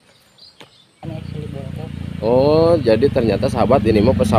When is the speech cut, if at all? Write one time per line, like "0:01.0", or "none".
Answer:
0:01.0